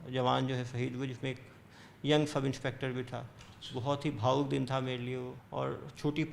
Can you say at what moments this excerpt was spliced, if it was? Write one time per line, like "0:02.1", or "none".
0:05.4